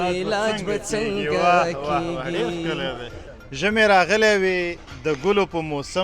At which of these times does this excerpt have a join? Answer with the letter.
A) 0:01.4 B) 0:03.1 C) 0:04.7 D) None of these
B